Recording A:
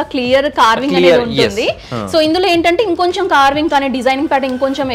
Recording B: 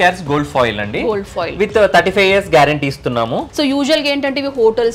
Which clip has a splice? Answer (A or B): B